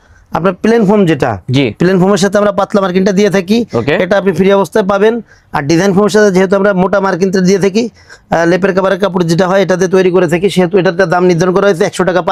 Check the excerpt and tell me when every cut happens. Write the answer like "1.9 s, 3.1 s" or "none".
none